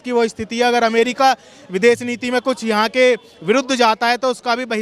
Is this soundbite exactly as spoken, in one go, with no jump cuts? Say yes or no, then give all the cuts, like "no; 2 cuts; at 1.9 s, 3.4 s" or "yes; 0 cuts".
yes; 0 cuts